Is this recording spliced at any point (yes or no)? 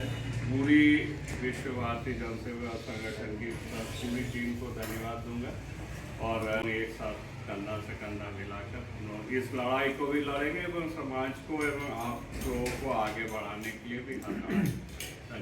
yes